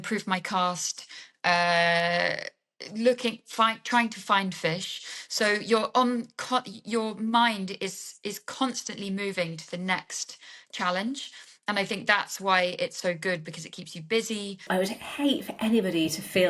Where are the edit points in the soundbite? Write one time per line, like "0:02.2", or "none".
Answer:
0:14.6

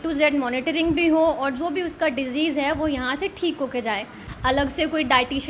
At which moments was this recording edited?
0:04.3

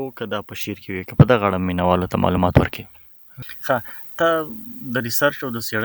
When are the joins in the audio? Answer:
none

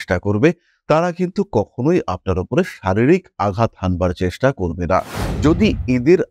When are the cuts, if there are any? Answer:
0:05.2

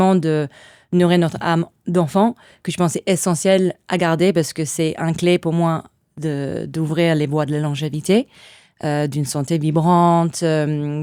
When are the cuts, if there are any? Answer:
none

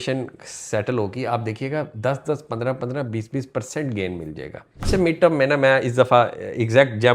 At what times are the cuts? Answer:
0:04.9

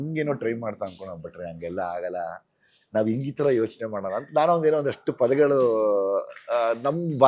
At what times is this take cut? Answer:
none

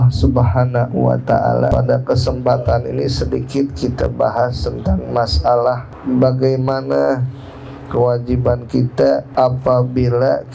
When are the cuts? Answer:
0:01.7
0:05.9
0:09.3

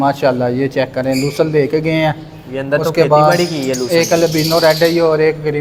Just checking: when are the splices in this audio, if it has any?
none

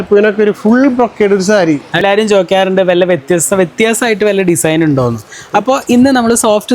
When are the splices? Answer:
0:02.0

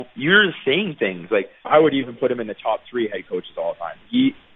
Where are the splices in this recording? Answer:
0:01.7

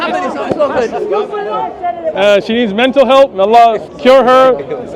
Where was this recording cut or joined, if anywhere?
0:01.6

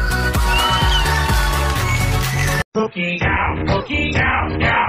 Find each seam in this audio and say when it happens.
0:02.3

